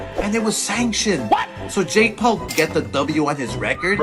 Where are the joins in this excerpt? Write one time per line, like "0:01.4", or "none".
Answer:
0:02.5